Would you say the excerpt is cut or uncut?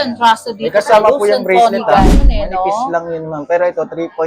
cut